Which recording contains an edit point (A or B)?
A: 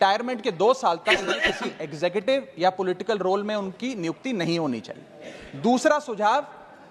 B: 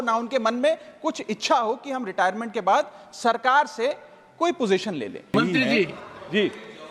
B